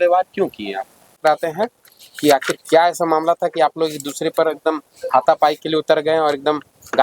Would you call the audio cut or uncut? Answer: cut